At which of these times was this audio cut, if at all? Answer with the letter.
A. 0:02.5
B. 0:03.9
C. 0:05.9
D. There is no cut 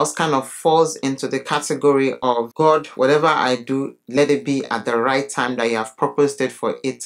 A